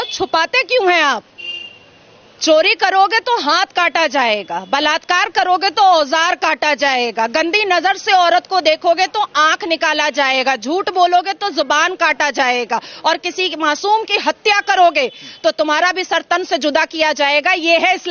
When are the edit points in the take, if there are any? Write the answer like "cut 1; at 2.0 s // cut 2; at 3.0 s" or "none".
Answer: none